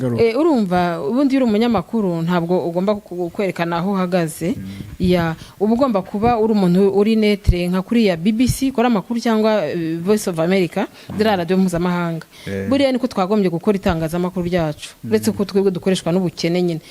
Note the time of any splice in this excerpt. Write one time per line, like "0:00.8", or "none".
none